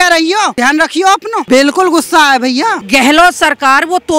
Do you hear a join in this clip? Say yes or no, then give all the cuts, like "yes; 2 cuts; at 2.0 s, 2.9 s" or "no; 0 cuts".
yes; 2 cuts; at 0.9 s, 2.8 s